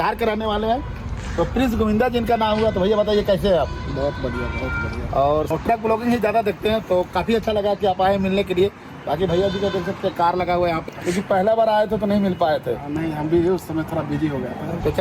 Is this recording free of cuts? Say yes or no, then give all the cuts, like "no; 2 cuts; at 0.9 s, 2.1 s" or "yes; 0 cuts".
no; 2 cuts; at 5.5 s, 10.9 s